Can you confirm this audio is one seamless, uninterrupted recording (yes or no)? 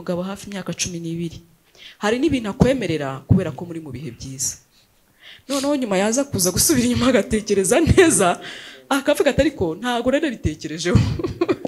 yes